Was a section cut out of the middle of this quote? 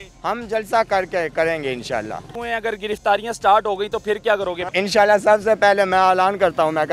yes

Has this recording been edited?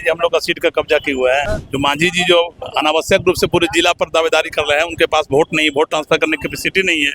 yes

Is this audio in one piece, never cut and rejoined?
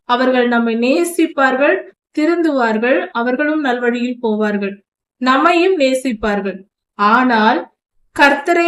yes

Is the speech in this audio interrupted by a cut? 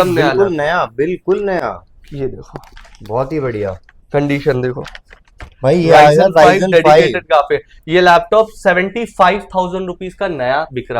no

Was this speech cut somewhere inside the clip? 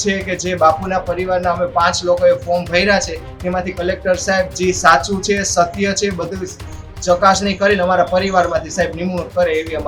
no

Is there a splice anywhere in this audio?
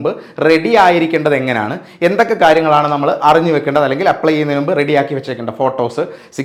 no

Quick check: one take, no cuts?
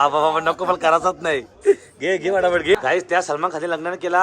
no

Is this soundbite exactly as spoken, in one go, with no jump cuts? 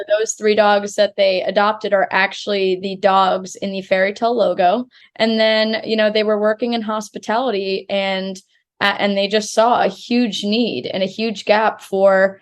no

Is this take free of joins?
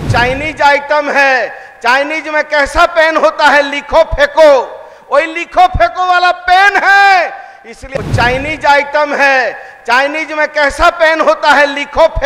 no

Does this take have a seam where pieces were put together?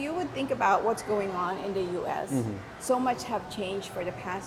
no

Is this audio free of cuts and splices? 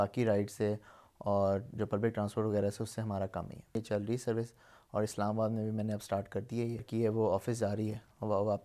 no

